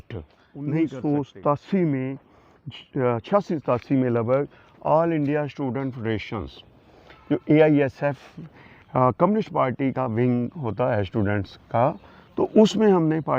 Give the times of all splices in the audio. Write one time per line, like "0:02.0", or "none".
0:00.9